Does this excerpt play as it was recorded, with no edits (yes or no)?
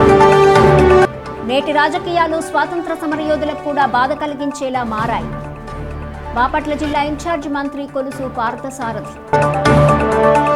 no